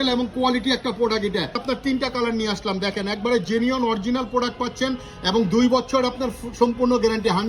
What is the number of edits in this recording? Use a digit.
1